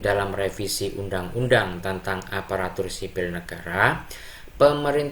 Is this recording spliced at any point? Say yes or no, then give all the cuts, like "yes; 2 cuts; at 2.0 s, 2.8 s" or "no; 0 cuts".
no; 0 cuts